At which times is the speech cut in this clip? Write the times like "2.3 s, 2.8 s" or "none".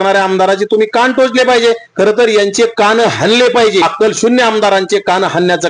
3.8 s

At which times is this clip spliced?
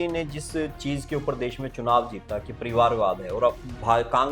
none

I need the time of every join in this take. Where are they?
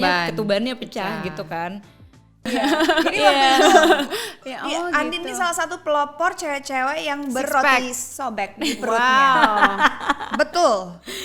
2.4 s

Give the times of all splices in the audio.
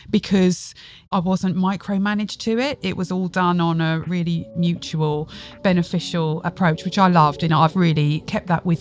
0.9 s, 4.1 s, 6.4 s, 7.8 s

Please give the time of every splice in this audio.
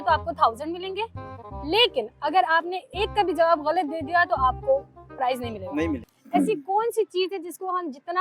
6.1 s

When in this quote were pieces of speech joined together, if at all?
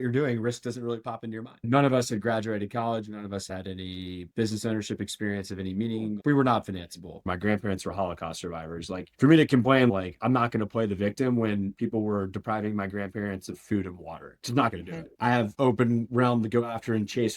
1.7 s, 7.2 s, 15.1 s

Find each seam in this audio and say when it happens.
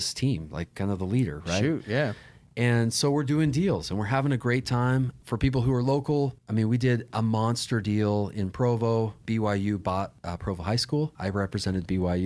5.1 s, 6.4 s, 9.2 s, 10.2 s, 11.1 s

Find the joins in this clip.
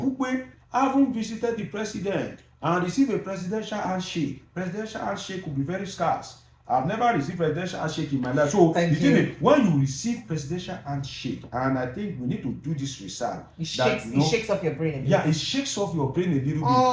none

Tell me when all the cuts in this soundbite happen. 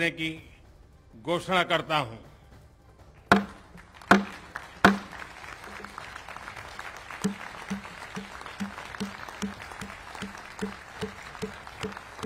none

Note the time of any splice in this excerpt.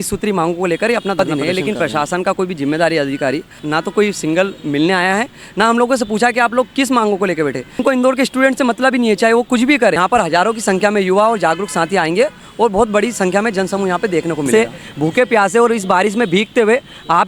1.2 s, 3.5 s, 7.8 s, 10.0 s, 14.5 s

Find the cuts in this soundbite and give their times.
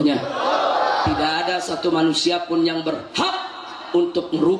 none

